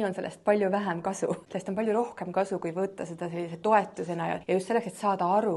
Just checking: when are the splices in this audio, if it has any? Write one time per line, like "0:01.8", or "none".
0:01.5
0:04.4